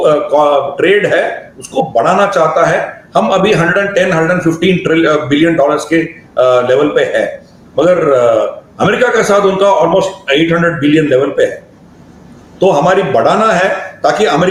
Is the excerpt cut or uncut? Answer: uncut